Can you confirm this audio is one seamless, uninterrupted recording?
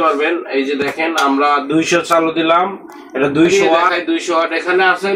no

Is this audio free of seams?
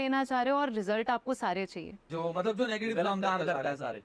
no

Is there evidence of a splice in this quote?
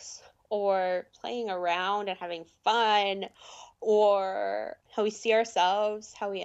yes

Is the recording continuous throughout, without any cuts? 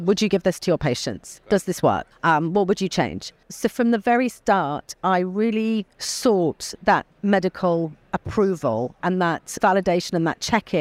no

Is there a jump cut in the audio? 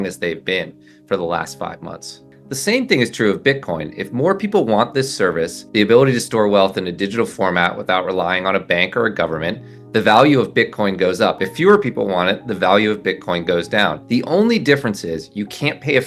yes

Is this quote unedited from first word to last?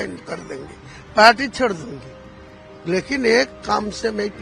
yes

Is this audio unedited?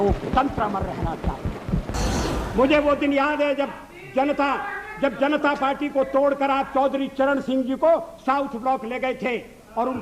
no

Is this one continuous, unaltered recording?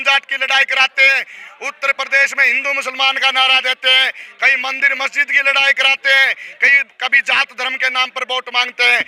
yes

